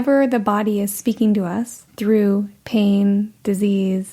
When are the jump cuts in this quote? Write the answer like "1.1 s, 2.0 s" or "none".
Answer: 1.8 s